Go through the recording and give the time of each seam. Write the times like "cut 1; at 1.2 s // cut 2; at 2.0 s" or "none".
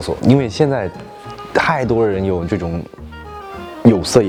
none